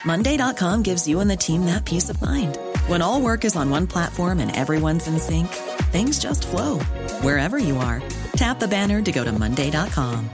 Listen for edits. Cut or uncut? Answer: uncut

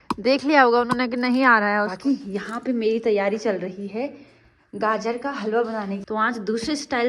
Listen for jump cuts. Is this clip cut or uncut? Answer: cut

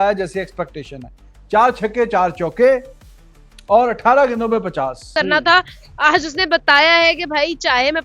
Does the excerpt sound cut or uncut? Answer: cut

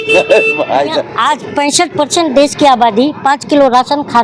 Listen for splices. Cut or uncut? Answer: cut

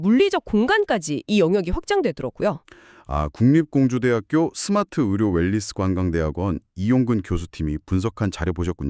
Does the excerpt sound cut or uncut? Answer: uncut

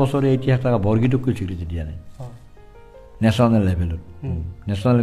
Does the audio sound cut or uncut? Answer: uncut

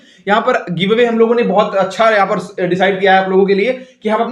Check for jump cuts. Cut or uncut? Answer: uncut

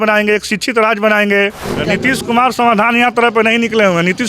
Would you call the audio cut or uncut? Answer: cut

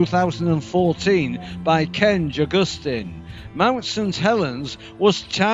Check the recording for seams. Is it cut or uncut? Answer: cut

